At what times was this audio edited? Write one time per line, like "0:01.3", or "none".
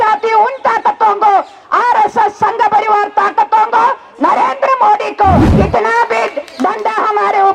0:05.5